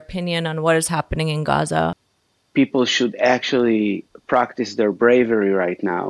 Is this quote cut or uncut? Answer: cut